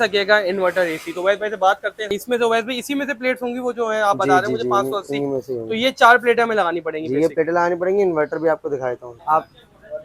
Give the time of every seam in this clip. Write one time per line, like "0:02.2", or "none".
0:02.1
0:09.1

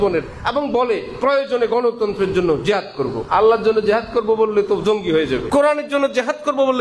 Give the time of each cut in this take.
0:03.2
0:05.4

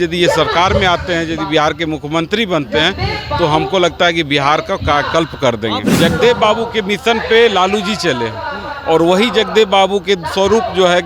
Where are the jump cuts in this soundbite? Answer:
0:05.9

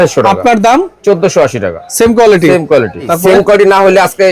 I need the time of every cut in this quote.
0:03.1

